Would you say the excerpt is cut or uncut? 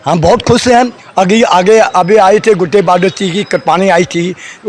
uncut